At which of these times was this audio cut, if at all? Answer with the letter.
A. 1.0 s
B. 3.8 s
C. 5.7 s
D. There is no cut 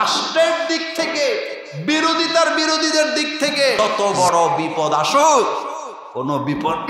B